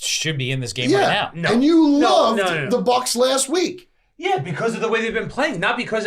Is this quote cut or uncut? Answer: uncut